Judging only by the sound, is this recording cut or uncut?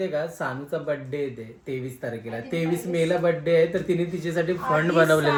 uncut